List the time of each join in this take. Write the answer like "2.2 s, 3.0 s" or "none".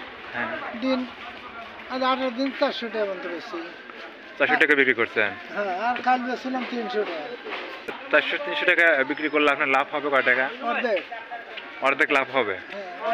8.0 s